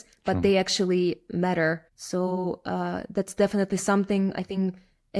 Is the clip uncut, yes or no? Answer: no